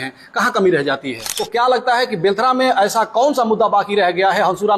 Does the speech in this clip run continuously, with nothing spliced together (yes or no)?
no